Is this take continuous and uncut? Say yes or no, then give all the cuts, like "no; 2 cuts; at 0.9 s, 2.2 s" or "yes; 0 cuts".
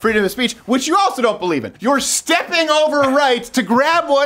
no; 1 cut; at 1.7 s